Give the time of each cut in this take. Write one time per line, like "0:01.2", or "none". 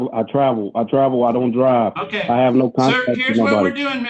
none